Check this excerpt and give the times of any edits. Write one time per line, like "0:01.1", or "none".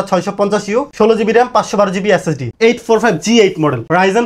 0:00.9
0:02.4